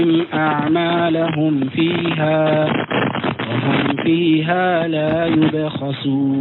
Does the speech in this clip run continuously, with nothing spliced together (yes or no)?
yes